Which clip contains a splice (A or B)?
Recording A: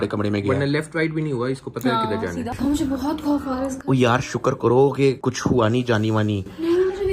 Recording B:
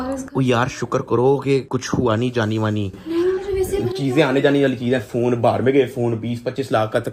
A